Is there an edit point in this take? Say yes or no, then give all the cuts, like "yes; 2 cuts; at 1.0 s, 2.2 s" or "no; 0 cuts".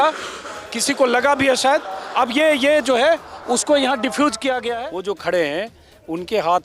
yes; 1 cut; at 4.8 s